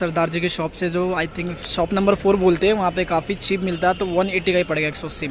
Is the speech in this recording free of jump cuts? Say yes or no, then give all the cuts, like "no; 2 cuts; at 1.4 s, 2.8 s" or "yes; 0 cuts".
yes; 0 cuts